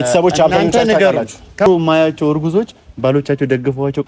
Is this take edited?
yes; 1 cut; at 1.7 s

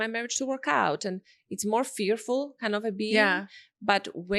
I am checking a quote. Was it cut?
no; 0 cuts

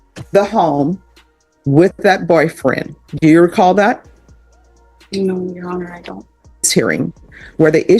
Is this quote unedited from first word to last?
no; 1 cut; at 6.7 s

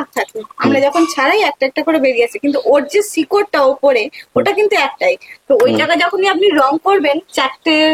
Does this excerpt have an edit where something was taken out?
no; 0 cuts

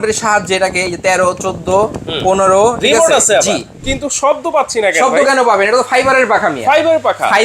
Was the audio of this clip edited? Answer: yes; 1 cut; at 3.9 s

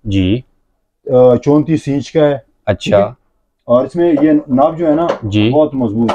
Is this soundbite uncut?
yes; 0 cuts

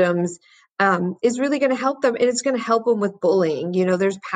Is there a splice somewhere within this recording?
no; 0 cuts

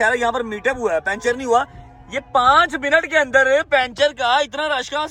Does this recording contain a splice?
no; 0 cuts

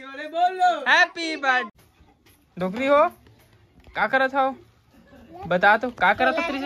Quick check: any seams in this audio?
yes; 1 cut; at 1.7 s

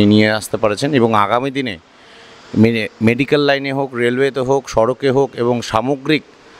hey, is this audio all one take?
yes; 0 cuts

